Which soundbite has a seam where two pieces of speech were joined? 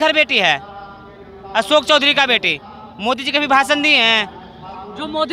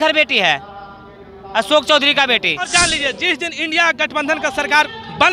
second; 1 cut; at 2.7 s

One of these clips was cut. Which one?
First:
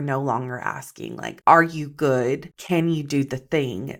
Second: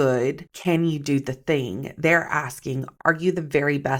second; 1 cut; at 2.9 s

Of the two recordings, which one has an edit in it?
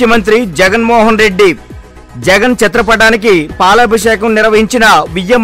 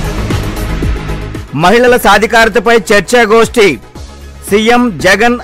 second; 1 cut; at 1.0 s

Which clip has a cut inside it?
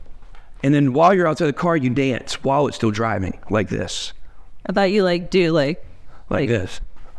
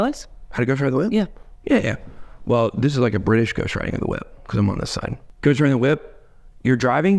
second; 1 cut; at 5.2 s

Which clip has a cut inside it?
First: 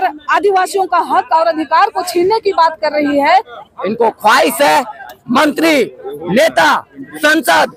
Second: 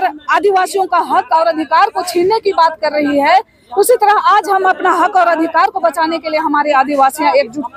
first; 1 cut; at 3.6 s

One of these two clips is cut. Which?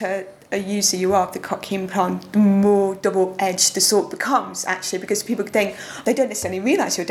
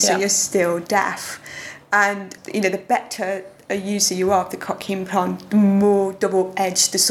first; 1 cut; at 5.9 s

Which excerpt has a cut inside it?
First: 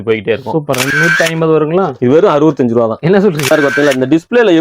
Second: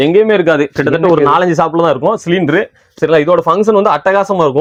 first; 2 cuts; at 0.9 s, 3.4 s

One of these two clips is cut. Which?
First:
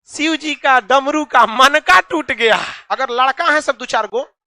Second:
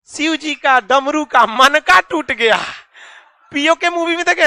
first; 1 cut; at 2.8 s

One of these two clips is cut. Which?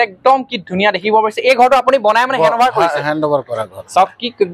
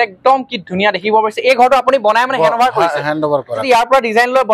second; 1 cut; at 3.6 s

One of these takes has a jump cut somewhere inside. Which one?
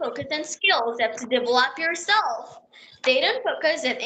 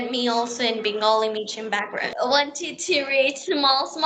second; 1 cut; at 2.1 s

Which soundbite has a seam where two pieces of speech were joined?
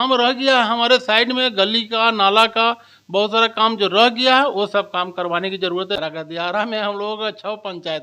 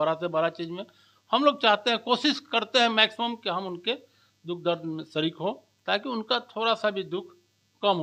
first; 1 cut; at 6.0 s

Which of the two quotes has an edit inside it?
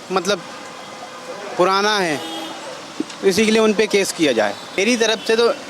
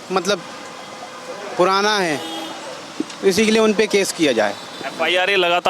first; 1 cut; at 4.7 s

